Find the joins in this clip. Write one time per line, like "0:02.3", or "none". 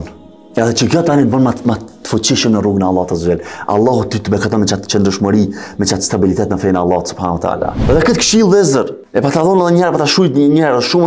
0:07.8